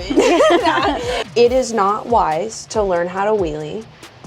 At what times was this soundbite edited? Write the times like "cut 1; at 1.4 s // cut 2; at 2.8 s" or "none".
cut 1; at 1.2 s